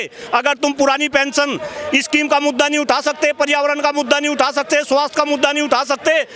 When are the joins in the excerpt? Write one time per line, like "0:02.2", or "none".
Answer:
none